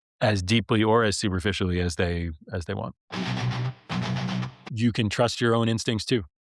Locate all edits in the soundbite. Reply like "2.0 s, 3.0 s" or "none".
3.0 s, 4.6 s